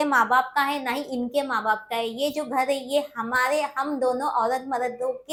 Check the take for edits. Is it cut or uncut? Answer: uncut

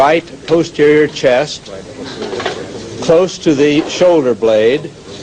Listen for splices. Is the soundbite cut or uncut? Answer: cut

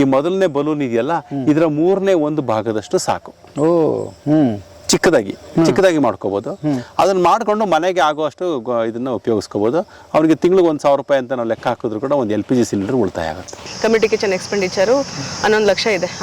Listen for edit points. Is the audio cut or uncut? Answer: cut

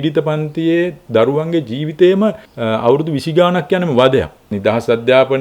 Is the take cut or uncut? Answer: cut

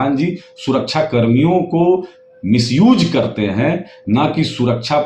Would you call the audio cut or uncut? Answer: uncut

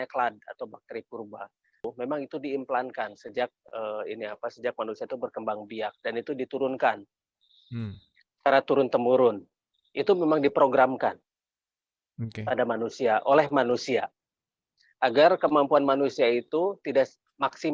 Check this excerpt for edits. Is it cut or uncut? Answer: cut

